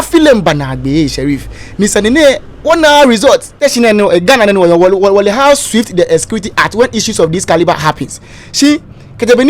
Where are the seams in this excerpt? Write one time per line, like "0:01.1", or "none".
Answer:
0:03.5